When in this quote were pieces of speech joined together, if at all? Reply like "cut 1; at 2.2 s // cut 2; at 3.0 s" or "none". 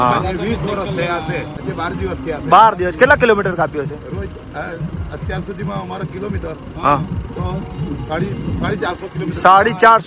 cut 1; at 1.5 s